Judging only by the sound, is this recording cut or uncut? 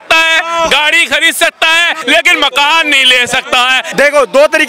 cut